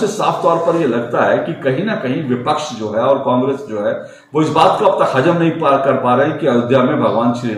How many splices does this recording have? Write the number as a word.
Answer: zero